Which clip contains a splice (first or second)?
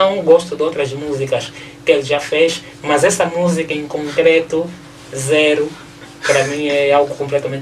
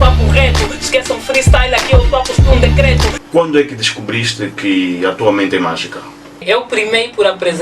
second